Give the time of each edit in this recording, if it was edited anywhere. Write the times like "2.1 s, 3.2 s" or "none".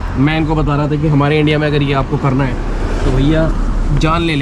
none